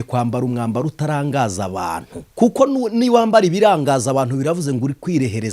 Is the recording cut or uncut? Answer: cut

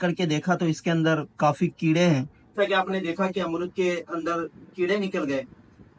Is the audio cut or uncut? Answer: uncut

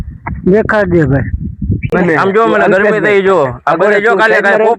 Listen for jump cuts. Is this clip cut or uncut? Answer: cut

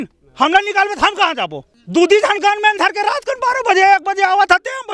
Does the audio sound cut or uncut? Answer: uncut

